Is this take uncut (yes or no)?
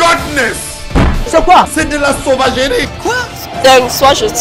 no